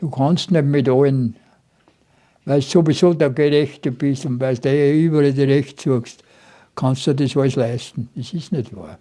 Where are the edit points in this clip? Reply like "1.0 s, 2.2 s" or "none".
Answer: none